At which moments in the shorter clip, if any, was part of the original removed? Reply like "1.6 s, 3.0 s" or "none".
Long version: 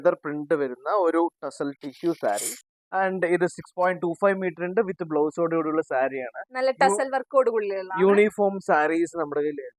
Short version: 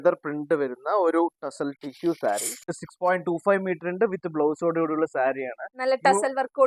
2.8 s